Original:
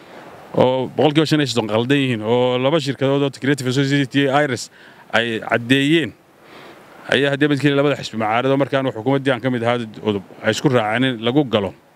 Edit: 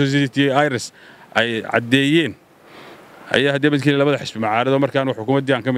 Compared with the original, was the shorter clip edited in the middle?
no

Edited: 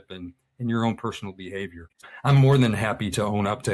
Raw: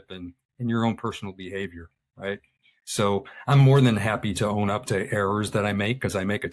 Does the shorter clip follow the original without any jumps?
no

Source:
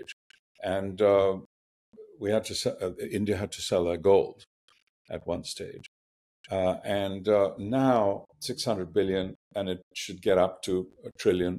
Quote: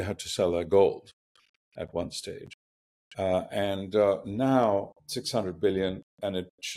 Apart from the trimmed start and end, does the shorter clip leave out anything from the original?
no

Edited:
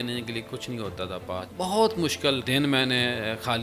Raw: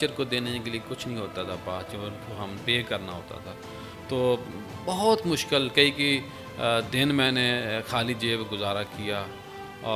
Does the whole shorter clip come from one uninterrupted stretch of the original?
no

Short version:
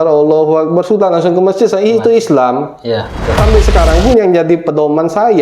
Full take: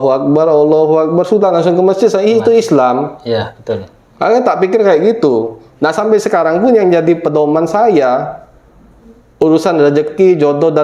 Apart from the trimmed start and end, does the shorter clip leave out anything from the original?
yes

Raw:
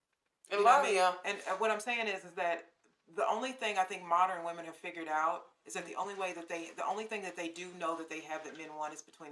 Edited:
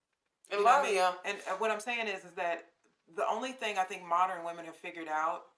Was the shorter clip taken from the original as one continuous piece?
yes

